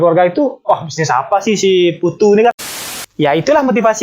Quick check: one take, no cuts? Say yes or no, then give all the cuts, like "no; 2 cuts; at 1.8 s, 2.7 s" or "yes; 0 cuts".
no; 1 cut; at 2.8 s